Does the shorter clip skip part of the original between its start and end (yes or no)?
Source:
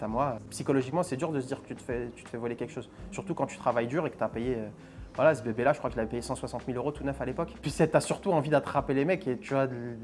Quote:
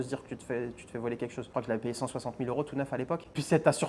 yes